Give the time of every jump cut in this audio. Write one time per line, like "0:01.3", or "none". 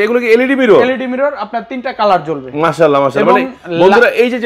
none